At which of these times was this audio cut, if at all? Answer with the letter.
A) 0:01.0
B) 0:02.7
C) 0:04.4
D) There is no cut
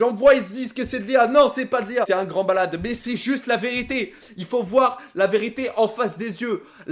D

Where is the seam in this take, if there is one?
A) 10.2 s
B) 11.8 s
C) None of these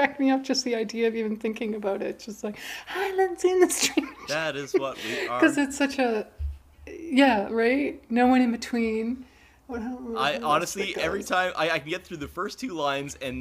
A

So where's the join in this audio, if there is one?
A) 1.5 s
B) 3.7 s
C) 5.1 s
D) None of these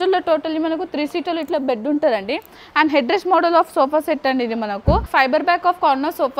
C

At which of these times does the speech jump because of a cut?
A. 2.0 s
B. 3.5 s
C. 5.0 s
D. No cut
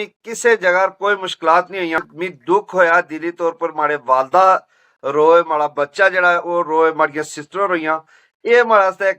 A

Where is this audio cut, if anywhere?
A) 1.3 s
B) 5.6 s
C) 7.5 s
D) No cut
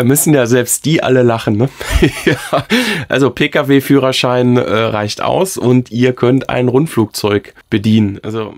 C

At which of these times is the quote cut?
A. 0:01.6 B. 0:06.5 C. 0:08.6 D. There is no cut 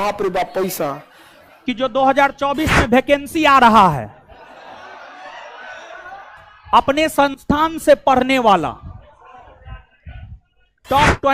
A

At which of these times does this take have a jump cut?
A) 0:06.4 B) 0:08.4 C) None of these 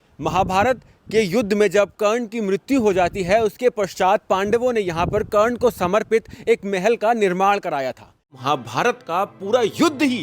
B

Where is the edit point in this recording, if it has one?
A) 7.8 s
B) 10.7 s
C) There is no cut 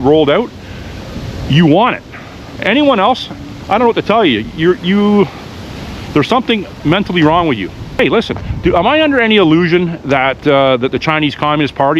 A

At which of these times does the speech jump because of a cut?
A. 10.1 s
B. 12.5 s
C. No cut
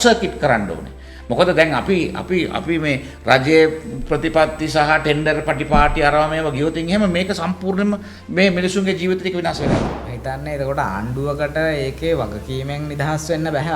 A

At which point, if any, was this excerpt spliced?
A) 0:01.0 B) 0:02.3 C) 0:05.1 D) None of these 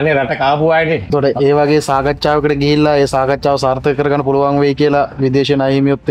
A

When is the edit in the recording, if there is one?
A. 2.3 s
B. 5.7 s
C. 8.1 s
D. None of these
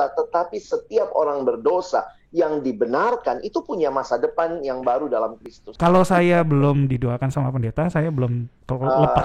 B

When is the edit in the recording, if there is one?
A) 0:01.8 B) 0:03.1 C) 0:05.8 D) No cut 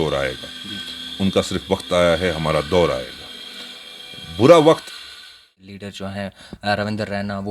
C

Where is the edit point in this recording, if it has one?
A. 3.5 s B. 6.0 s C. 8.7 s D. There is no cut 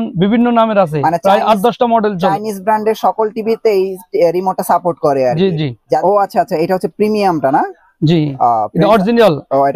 B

